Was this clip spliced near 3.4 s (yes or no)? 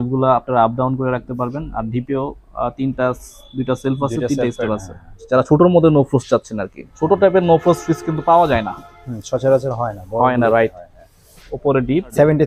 no